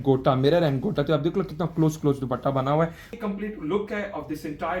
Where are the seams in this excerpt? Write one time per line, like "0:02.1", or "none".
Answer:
0:03.1